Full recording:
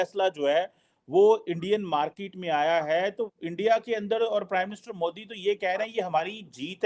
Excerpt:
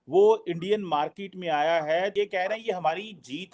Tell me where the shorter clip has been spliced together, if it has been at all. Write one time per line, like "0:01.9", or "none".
0:02.1